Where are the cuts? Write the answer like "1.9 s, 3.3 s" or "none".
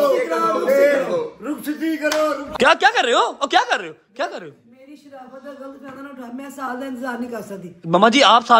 2.4 s